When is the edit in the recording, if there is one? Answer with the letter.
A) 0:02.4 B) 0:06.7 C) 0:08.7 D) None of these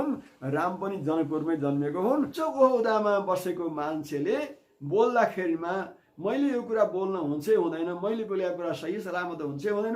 A